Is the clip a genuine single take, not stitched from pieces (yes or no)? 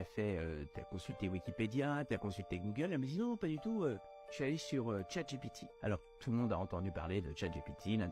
yes